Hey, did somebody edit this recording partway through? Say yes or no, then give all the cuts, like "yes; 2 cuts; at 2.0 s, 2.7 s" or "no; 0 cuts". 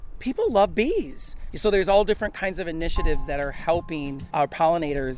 yes; 2 cuts; at 1.4 s, 4.2 s